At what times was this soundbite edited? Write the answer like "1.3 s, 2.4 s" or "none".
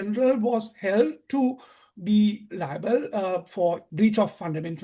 3.9 s